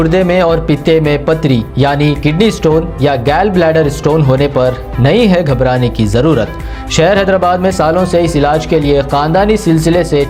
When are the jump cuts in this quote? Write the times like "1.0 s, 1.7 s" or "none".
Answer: none